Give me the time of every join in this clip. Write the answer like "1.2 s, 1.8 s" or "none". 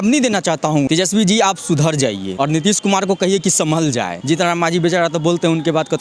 0.9 s, 2.3 s, 4.2 s